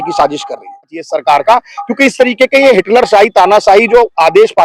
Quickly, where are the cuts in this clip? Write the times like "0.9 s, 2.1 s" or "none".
1.0 s